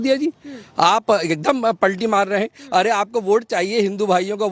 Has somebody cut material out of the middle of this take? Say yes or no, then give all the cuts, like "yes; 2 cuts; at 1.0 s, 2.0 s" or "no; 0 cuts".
no; 0 cuts